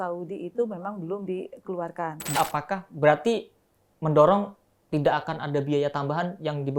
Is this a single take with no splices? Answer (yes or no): no